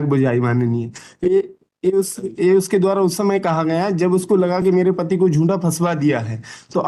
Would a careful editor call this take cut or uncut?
uncut